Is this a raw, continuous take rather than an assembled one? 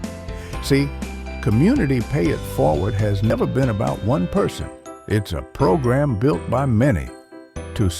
no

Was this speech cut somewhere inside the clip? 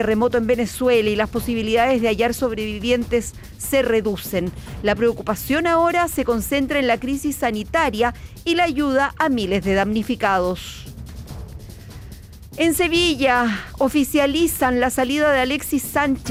no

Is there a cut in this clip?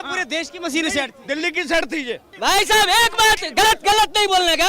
yes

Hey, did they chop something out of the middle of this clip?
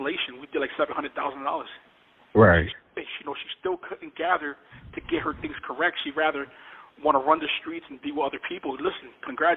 no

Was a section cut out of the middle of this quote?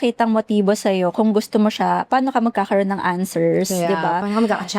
no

